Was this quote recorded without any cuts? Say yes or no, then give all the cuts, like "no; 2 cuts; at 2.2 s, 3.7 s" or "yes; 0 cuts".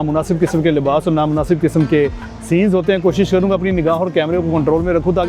yes; 0 cuts